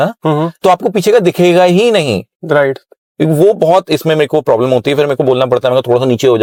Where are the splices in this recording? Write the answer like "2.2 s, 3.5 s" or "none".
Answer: none